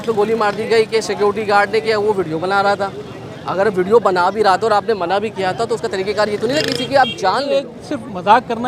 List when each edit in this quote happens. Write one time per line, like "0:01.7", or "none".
0:07.7

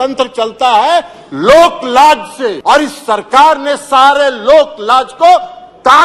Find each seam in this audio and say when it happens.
0:02.6

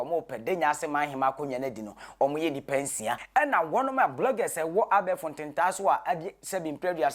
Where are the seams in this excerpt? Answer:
0:03.2

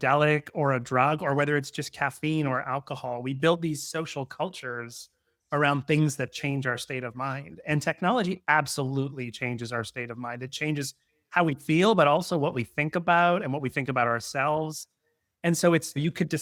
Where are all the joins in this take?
none

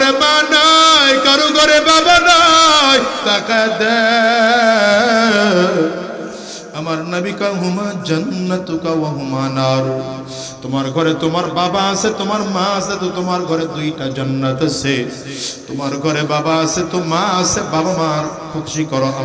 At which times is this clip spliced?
0:03.2

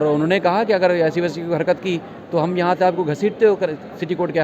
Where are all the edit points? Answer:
none

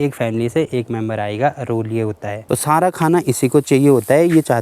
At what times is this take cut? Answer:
0:02.4

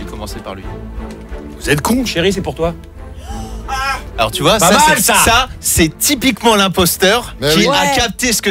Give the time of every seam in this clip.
0:04.1
0:07.3

